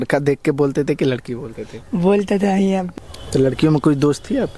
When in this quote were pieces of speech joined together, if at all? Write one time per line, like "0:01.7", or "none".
0:02.9